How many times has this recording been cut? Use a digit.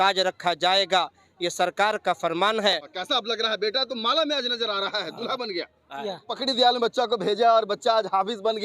2